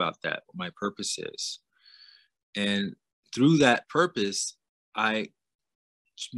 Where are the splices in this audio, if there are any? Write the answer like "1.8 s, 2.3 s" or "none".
none